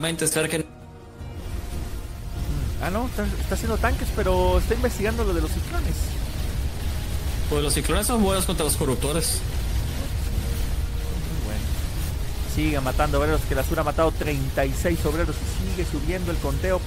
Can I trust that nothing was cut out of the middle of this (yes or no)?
yes